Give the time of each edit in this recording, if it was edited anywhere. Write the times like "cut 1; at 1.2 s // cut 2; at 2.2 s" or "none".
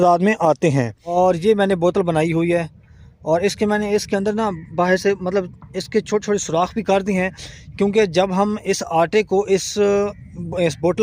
cut 1; at 1.0 s